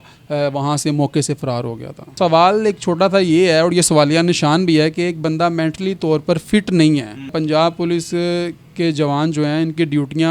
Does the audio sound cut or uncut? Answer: cut